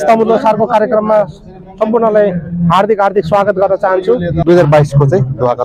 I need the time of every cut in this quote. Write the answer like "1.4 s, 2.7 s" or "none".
4.4 s